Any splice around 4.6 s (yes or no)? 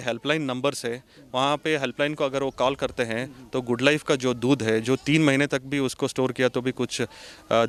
no